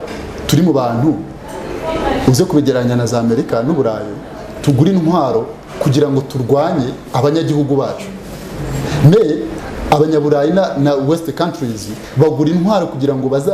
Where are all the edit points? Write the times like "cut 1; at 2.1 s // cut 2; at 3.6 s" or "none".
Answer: none